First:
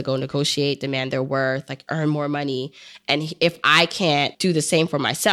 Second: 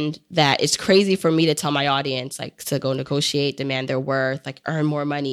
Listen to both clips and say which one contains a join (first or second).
first